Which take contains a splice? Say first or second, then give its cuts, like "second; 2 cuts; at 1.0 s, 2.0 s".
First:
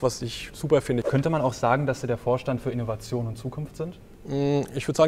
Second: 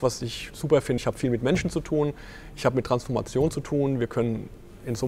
first; 2 cuts; at 1.0 s, 4.1 s